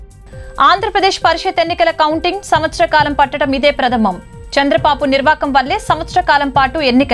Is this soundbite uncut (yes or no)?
yes